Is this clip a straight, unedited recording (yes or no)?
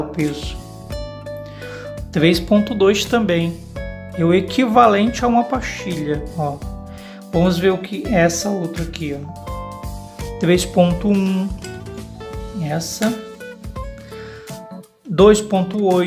yes